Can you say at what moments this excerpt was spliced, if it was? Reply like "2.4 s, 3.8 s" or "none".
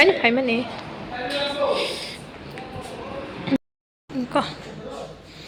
none